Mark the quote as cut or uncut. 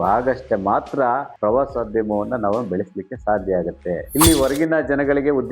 cut